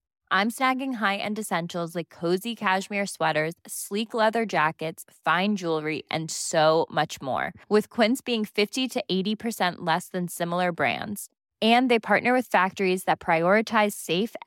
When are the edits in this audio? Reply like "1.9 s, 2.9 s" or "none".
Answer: none